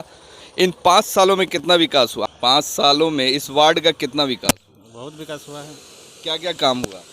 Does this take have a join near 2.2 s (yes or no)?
yes